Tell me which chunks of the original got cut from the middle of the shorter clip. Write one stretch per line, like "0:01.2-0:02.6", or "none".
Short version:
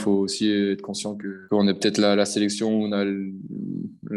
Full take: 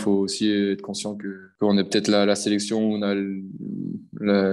0:01.3-0:01.4